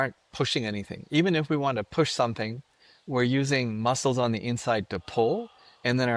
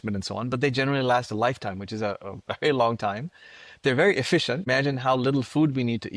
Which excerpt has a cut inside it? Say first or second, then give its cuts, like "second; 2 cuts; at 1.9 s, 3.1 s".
second; 1 cut; at 4.7 s